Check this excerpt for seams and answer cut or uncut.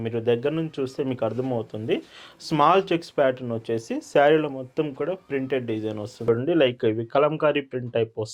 cut